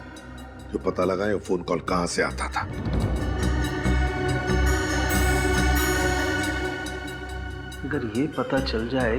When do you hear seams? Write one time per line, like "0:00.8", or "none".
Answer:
0:03.1